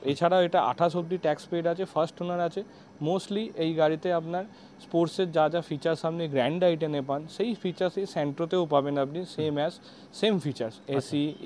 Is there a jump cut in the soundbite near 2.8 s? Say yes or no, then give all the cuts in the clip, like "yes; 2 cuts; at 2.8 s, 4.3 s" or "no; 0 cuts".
no; 0 cuts